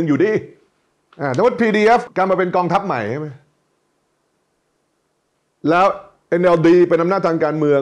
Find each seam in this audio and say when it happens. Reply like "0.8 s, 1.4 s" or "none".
none